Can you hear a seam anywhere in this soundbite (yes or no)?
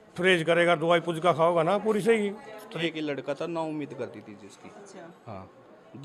yes